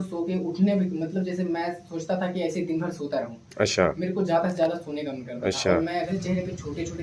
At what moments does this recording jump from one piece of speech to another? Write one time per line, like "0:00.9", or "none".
0:06.1

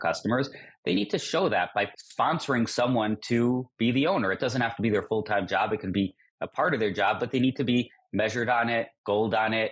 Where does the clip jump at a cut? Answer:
none

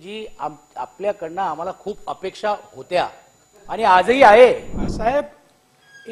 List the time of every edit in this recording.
0:04.8

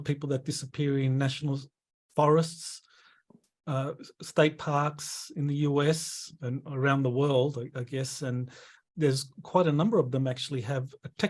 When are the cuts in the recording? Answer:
0:08.8

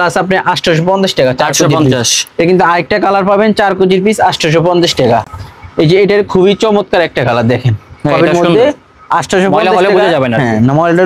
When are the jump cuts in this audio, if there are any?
none

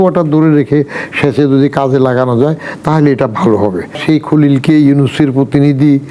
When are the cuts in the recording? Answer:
0:04.0

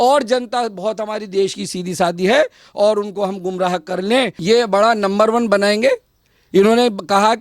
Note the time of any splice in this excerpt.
0:04.4

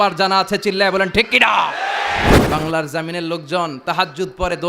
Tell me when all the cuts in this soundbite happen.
0:02.4

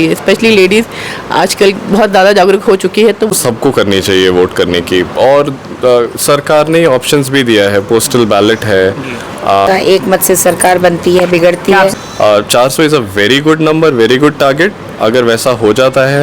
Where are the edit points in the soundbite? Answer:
0:03.4
0:09.7
0:11.9

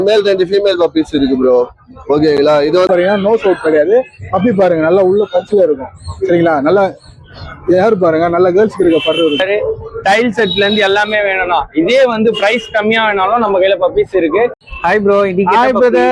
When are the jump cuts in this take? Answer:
0:02.9
0:09.4
0:14.7

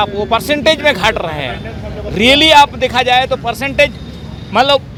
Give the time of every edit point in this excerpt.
none

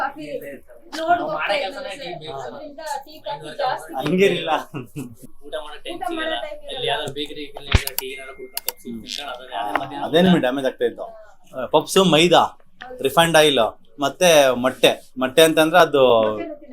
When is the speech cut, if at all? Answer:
0:05.4

